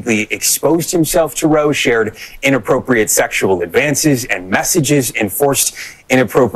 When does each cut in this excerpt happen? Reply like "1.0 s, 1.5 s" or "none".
4.3 s